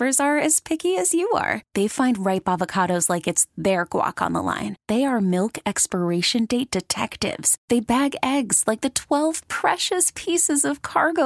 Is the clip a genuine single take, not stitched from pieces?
yes; 0 cuts

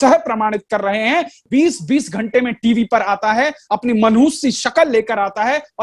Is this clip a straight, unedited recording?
no; 1 cut; at 1.4 s

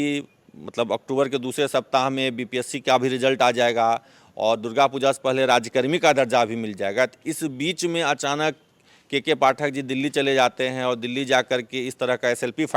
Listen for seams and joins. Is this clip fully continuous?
yes; 0 cuts

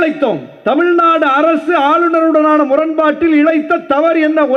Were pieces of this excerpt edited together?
no; 0 cuts

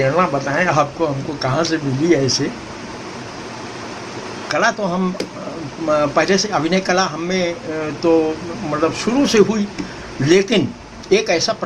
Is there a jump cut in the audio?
no; 0 cuts

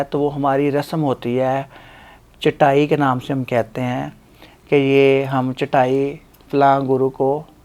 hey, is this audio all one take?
yes; 0 cuts

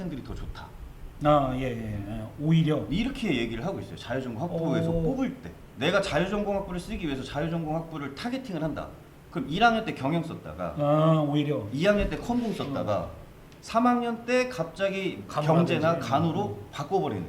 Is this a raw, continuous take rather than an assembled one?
no; 1 cut; at 15.2 s

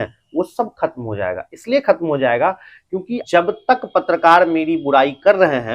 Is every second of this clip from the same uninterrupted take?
no; 1 cut; at 3.2 s

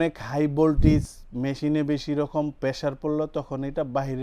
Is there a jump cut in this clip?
no; 0 cuts

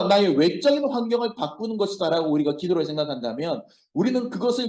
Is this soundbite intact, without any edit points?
yes; 0 cuts

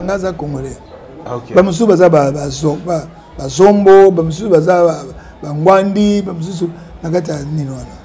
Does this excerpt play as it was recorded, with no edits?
yes; 0 cuts

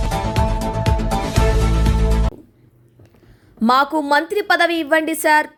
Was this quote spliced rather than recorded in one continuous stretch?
no; 0 cuts

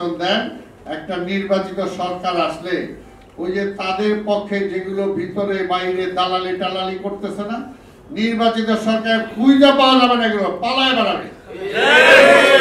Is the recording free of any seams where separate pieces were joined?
yes; 0 cuts

